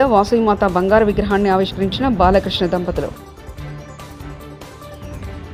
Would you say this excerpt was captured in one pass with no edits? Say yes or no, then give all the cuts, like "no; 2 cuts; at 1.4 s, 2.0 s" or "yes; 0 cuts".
yes; 0 cuts